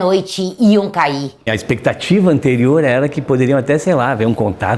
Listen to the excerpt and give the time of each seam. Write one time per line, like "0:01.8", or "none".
0:01.6